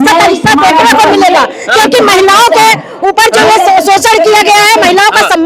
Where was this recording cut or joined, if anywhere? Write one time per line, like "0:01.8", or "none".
none